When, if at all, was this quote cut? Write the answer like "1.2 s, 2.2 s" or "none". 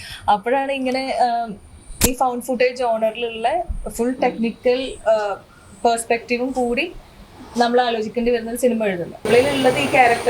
9.2 s

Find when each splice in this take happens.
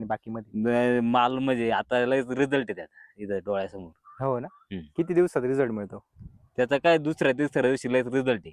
none

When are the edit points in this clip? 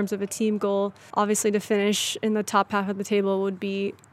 1.0 s

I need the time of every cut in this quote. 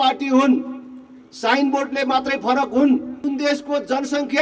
3.2 s

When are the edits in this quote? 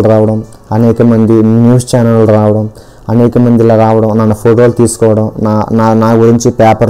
none

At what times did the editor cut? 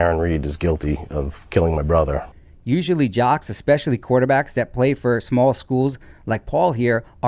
none

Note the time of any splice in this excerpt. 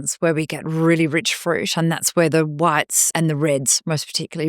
3.1 s

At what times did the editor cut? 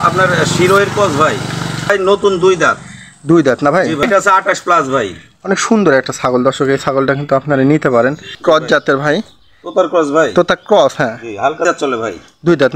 1.9 s, 4.0 s, 8.3 s, 11.6 s

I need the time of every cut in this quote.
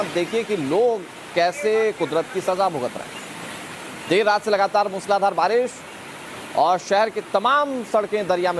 2.8 s

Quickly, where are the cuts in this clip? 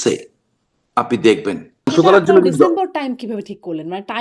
1.9 s

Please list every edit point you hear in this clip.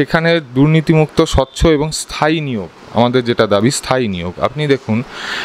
none

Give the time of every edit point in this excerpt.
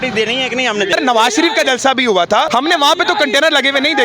0.9 s, 2.5 s

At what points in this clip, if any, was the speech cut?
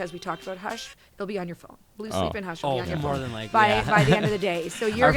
none

